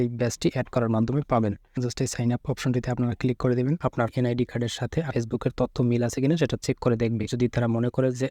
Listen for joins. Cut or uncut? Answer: cut